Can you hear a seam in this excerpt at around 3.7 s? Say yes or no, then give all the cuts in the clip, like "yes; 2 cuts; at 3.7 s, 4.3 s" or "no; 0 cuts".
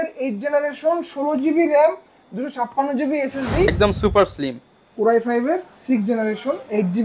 yes; 1 cut; at 3.7 s